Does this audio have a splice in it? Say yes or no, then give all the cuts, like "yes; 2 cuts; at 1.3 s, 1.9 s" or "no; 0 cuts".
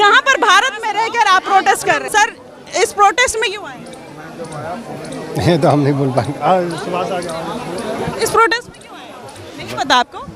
yes; 1 cut; at 2.0 s